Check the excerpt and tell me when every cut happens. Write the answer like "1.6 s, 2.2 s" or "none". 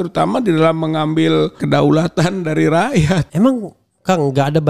1.6 s, 3.3 s